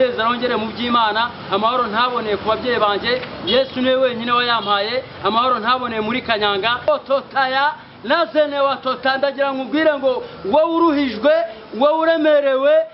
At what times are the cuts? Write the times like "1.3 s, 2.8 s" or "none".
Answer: 6.9 s

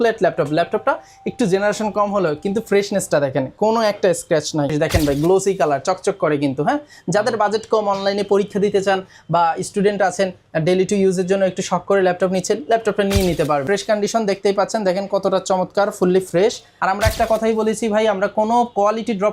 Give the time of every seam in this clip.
4.7 s, 13.6 s, 16.7 s

